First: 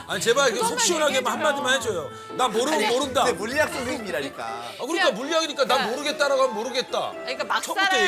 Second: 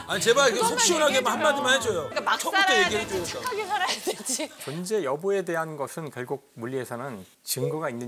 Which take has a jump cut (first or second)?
second